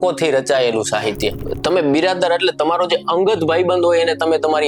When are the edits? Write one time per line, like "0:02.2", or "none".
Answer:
0:01.4